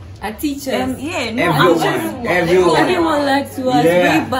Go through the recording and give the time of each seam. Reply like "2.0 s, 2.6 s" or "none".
none